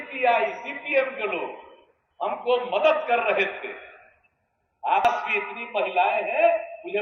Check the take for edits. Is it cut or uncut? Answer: cut